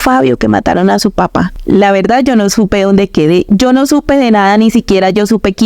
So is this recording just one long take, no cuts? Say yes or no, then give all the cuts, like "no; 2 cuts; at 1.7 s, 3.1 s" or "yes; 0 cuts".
no; 1 cut; at 1.6 s